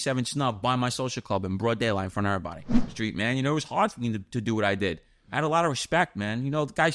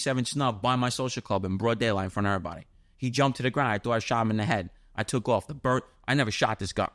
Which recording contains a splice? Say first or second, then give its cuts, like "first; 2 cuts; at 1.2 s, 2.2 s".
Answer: first; 1 cut; at 2.9 s